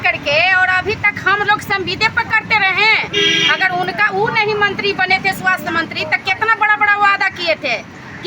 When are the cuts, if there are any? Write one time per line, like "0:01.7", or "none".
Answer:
none